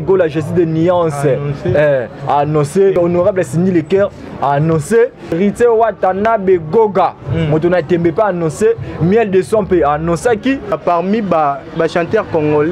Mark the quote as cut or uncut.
cut